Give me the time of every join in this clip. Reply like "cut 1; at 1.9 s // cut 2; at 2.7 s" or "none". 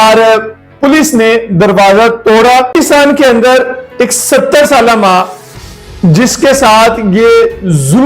cut 1; at 2.7 s